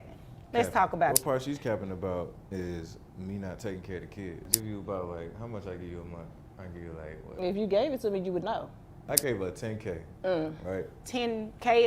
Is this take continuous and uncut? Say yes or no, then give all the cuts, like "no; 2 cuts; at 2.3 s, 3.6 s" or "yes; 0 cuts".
no; 3 cuts; at 1.2 s, 4.5 s, 9.1 s